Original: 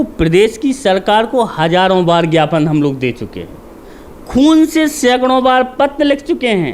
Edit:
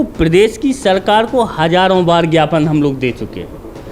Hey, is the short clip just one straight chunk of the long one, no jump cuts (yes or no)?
yes